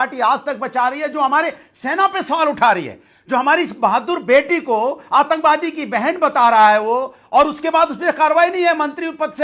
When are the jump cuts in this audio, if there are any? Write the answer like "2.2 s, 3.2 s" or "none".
none